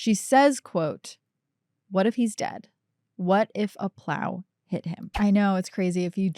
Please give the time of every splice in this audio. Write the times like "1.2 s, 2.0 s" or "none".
5.1 s